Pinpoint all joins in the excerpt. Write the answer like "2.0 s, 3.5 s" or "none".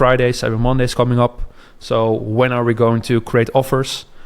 none